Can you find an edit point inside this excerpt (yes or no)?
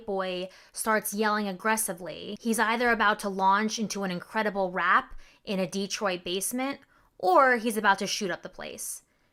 no